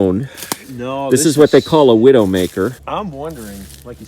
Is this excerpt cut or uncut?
cut